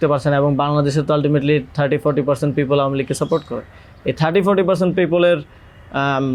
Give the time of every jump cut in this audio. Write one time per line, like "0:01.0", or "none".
none

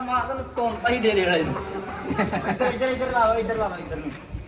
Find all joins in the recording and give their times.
none

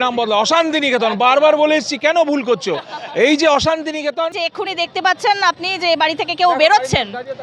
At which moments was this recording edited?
0:04.4

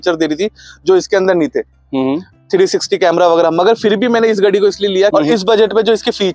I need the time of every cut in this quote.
0:05.1

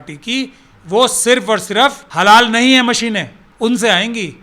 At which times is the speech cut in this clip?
0:02.1
0:03.4

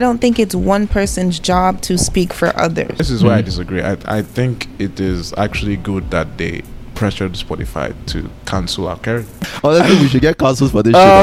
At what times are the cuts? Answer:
0:03.0
0:09.4

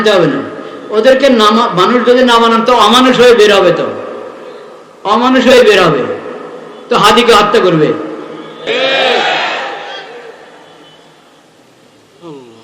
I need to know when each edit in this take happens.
0:08.5

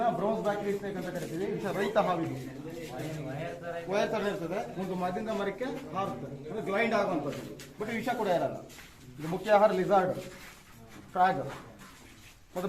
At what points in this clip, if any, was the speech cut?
none

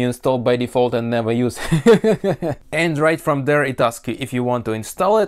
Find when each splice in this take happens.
0:02.6

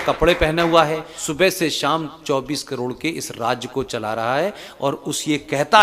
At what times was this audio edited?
0:01.1

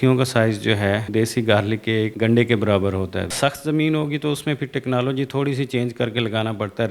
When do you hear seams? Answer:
0:01.1
0:02.1
0:03.3

